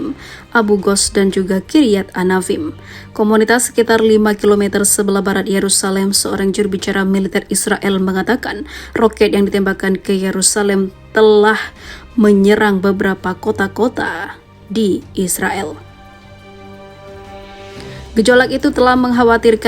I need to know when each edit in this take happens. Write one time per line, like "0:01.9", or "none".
0:15.8
0:18.1